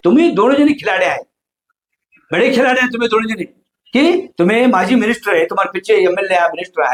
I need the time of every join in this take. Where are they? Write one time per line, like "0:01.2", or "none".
none